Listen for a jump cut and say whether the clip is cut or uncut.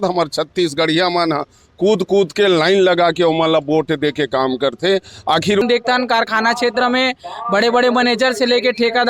cut